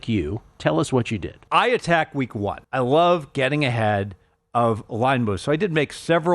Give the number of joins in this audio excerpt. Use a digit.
2